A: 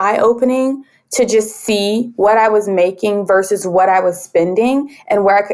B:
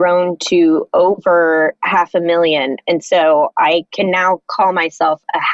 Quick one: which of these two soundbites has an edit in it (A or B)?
B